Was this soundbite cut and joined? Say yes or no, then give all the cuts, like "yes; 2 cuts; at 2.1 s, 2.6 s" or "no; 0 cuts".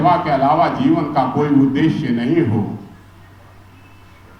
no; 0 cuts